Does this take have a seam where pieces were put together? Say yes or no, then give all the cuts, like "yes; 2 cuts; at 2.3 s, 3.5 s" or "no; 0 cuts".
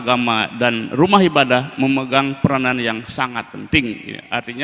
no; 0 cuts